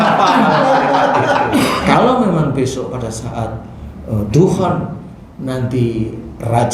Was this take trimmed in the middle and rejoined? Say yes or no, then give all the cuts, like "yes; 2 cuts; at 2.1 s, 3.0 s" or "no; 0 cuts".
yes; 1 cut; at 1.8 s